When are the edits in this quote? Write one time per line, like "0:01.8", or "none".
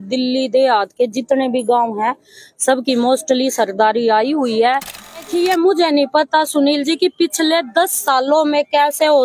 0:05.2